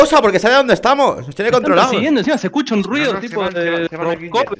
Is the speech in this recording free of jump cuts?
no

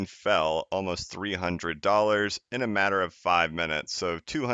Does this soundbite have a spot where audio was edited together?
no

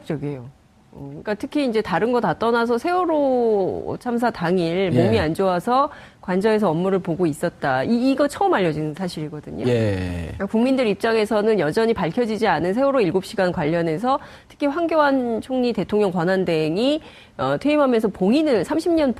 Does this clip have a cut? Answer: yes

